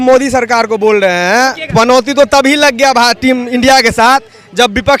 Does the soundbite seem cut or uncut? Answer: cut